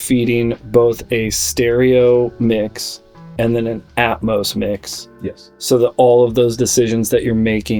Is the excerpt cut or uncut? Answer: uncut